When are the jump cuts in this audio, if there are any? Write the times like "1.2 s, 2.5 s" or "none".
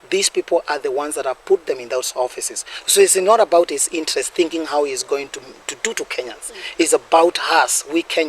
none